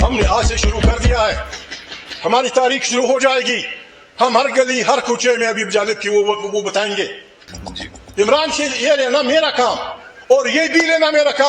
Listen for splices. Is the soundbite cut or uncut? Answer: cut